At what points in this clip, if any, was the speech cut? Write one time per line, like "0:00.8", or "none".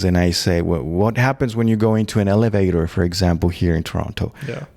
none